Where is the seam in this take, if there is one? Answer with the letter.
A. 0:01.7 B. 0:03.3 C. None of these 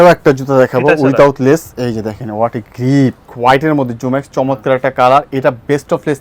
B